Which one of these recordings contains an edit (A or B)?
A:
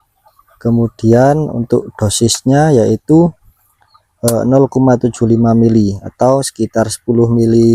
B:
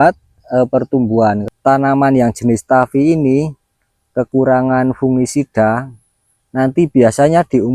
B